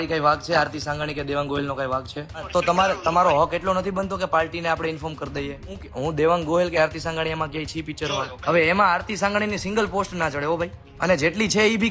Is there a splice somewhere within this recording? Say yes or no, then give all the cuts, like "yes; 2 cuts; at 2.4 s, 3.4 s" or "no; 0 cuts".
yes; 4 cuts; at 2.5 s, 5.9 s, 8.3 s, 10.8 s